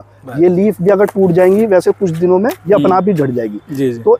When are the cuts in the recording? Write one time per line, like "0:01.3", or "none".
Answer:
none